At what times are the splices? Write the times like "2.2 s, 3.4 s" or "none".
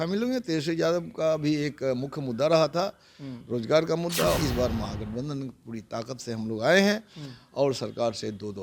4.4 s